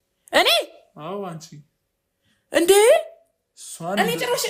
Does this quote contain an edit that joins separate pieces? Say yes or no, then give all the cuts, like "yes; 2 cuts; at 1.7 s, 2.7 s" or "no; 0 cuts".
no; 0 cuts